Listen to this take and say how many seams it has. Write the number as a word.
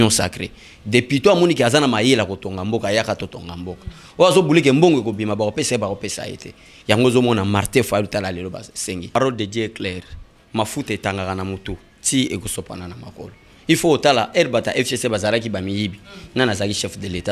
one